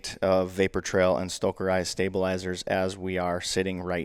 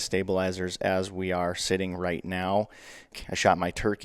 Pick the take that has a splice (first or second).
second